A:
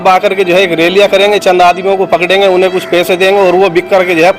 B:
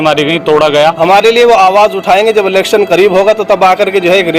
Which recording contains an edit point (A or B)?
B